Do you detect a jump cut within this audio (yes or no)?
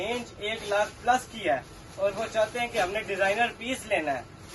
no